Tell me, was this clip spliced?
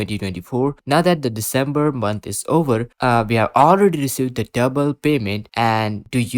no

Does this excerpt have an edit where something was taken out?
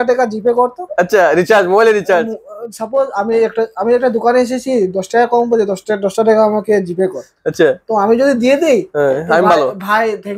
no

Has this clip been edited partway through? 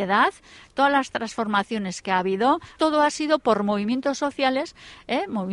yes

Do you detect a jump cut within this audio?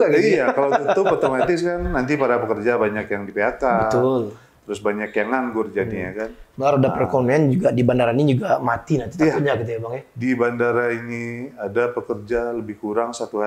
no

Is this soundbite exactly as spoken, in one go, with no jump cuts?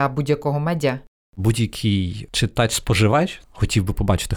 no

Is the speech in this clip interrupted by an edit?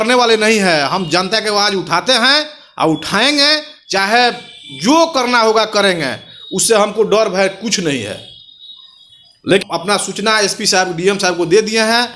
no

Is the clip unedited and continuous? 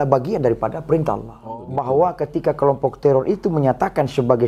no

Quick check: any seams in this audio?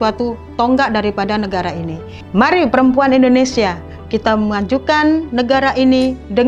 no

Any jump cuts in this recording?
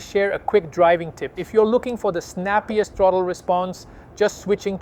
no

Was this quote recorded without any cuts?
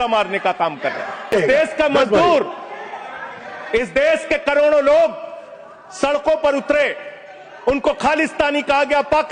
no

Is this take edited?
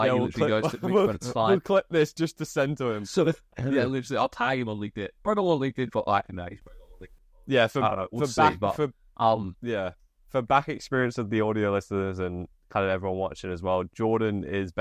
yes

